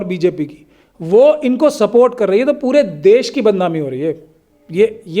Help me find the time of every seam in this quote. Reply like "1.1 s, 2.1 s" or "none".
none